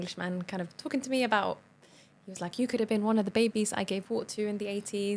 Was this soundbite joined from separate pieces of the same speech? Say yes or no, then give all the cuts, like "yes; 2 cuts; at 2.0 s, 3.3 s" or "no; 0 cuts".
no; 0 cuts